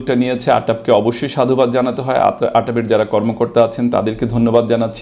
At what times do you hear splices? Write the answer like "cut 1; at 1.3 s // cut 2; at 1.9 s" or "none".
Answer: none